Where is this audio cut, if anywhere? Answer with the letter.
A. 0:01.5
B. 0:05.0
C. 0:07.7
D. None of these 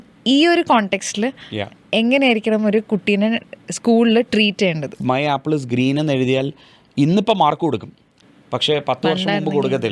B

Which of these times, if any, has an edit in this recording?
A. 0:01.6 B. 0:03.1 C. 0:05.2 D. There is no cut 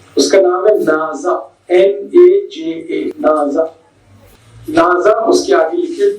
D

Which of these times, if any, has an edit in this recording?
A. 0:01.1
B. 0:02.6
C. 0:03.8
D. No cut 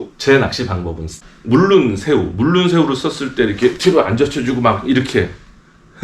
A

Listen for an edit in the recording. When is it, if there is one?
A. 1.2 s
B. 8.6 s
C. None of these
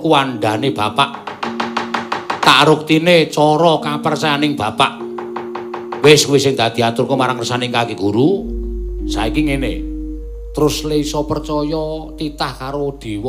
B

